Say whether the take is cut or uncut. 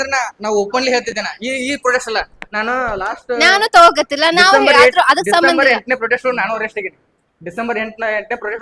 uncut